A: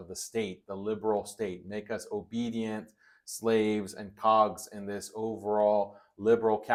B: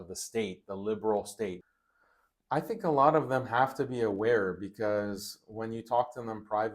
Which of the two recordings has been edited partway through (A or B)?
B